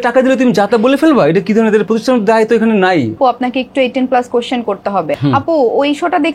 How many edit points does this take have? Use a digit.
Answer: 2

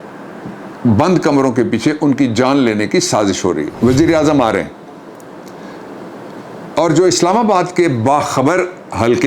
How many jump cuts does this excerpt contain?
1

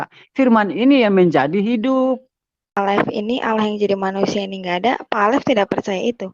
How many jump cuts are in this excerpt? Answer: 1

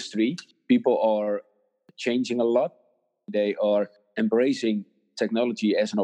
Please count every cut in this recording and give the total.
0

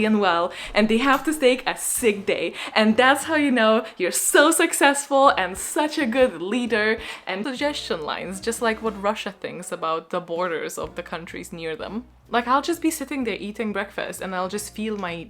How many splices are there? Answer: 2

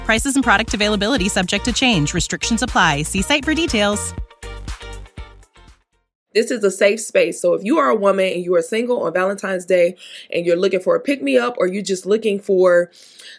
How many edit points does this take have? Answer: 1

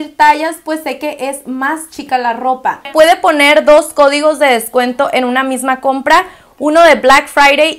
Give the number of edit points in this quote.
1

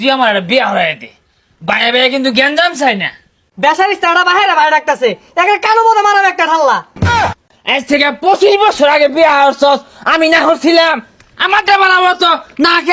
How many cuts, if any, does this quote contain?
2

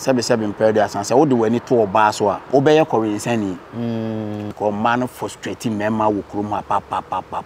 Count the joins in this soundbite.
2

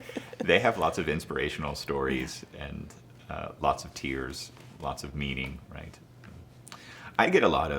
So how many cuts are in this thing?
1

